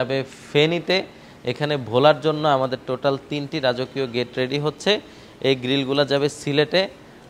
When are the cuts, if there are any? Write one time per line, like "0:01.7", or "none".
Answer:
none